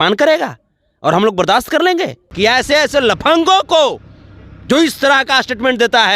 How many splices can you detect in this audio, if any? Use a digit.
1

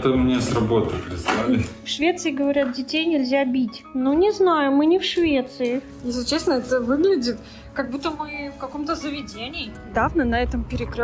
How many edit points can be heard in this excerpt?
4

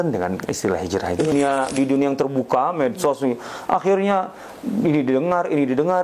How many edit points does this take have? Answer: 1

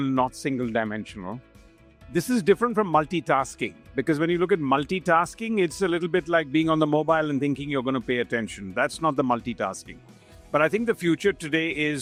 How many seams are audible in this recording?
0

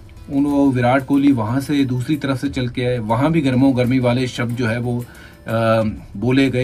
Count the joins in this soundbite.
0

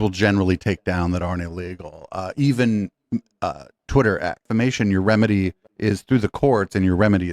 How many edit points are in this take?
1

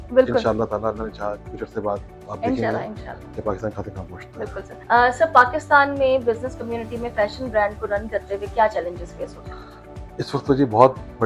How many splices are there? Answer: 0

